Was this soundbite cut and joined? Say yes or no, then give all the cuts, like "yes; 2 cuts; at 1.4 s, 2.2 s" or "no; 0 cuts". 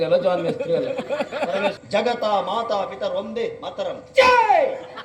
yes; 1 cut; at 1.8 s